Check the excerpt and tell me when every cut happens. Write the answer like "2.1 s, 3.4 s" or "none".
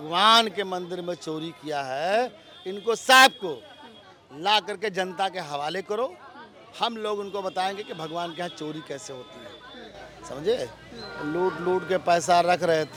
none